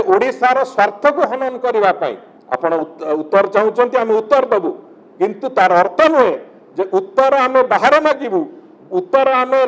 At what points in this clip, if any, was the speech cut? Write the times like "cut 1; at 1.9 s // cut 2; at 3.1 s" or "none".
cut 1; at 2.3 s